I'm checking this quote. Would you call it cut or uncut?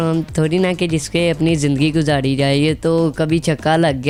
uncut